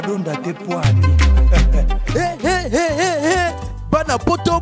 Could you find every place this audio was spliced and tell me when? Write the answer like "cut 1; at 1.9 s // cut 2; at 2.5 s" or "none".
none

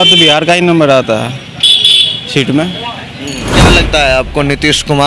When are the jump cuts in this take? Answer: cut 1; at 3.5 s

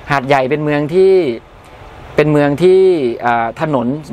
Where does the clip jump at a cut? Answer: none

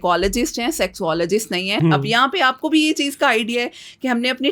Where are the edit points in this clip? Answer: cut 1; at 1.8 s

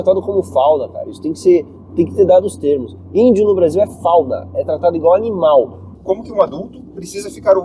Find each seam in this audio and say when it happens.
cut 1; at 5.9 s

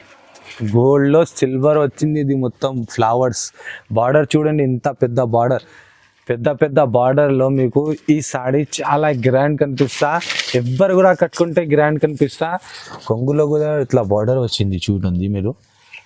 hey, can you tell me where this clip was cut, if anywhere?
cut 1; at 12.8 s

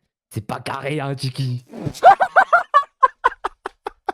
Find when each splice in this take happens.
none

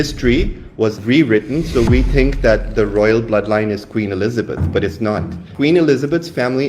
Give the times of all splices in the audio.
cut 1; at 1.0 s

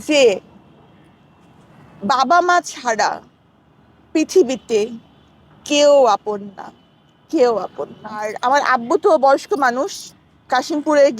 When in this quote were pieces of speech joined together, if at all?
cut 1; at 8.3 s

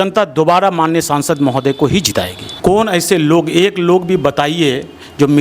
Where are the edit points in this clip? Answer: cut 1; at 2.5 s

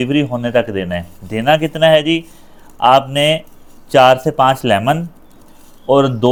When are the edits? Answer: none

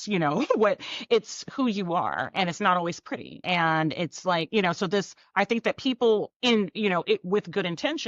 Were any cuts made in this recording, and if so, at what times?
cut 1; at 3.4 s // cut 2; at 5.2 s // cut 3; at 6.3 s

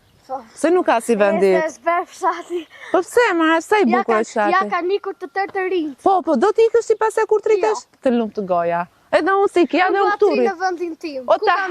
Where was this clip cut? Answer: none

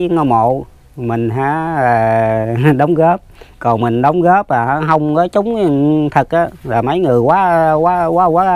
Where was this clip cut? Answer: none

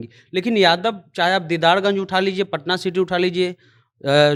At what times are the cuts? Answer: none

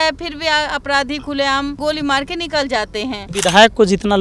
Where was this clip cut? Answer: cut 1; at 1.8 s // cut 2; at 3.3 s

